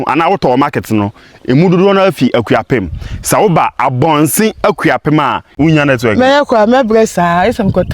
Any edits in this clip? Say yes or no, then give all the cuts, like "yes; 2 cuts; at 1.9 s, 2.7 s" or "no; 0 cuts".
yes; 1 cut; at 5.5 s